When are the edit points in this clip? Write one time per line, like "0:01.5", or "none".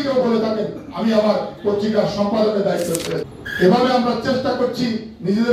0:03.4